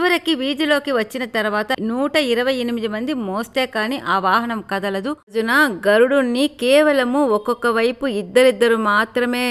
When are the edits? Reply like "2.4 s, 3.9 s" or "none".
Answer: 5.3 s